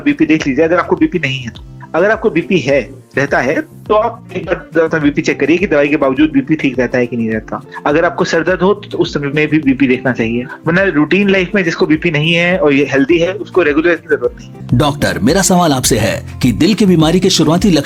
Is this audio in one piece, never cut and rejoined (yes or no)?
yes